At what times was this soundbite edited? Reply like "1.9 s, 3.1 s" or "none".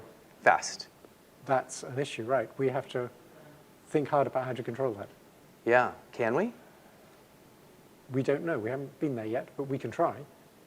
none

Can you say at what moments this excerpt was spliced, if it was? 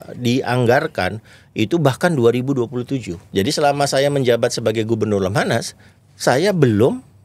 3.2 s

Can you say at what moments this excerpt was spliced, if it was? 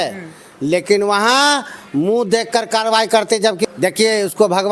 3.6 s

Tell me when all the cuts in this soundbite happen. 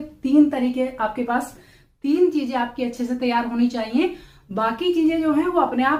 none

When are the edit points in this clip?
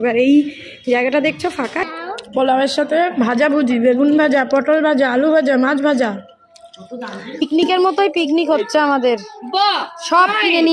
1.8 s, 7.4 s

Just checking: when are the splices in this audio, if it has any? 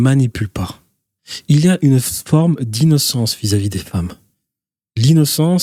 none

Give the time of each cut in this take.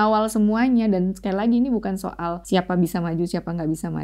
2.4 s

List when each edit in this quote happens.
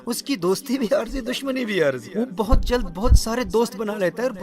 2.0 s

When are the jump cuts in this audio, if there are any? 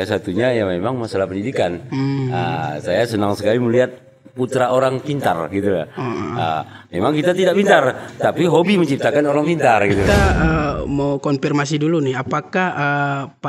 10.1 s

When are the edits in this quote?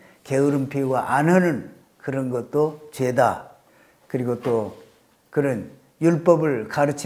none

